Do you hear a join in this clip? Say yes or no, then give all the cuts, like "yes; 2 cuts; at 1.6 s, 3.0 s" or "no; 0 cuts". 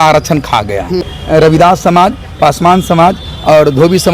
yes; 1 cut; at 1.1 s